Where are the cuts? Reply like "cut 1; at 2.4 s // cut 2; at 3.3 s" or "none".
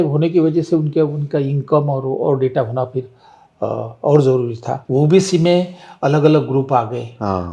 cut 1; at 4.8 s